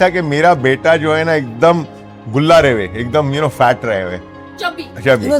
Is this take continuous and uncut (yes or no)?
yes